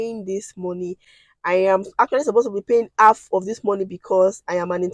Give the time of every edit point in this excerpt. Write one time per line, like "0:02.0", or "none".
none